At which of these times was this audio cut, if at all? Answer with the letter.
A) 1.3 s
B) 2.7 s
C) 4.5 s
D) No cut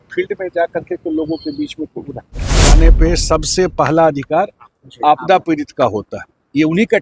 B